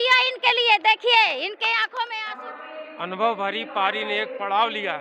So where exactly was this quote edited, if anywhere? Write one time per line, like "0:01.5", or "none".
0:02.2